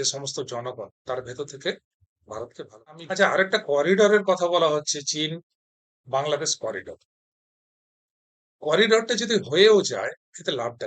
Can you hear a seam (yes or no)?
yes